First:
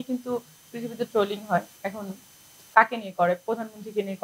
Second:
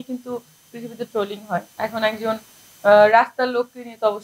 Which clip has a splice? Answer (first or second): first